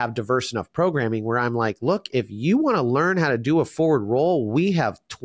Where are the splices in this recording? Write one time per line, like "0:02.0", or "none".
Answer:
none